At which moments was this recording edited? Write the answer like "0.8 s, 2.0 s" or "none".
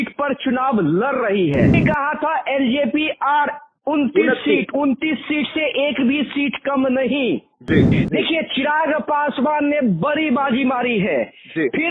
1.8 s, 8.0 s